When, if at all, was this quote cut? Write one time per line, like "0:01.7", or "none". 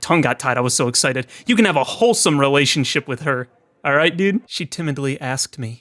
0:04.6